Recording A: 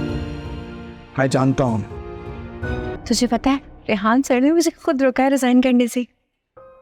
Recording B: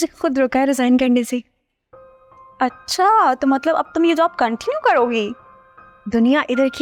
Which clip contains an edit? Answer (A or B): A